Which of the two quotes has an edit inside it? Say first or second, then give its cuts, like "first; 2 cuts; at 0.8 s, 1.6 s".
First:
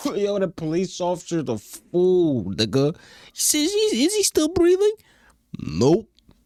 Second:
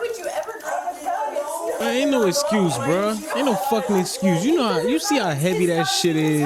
second; 1 cut; at 1.8 s